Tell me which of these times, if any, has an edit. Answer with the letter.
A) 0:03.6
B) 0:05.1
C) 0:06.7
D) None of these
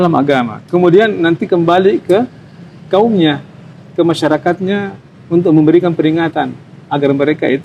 D